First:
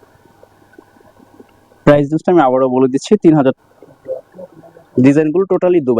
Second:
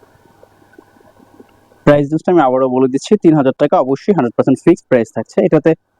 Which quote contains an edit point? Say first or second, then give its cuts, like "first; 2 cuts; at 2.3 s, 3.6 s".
first; 1 cut; at 3.6 s